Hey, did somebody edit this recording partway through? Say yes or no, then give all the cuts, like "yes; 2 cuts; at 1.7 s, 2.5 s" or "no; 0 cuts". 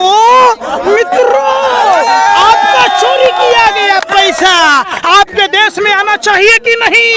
no; 0 cuts